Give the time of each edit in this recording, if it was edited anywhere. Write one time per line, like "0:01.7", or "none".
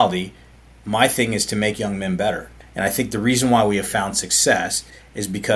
0:02.5